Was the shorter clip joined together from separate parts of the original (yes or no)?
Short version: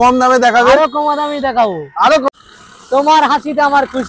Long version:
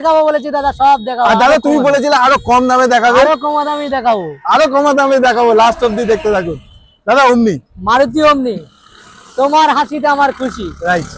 yes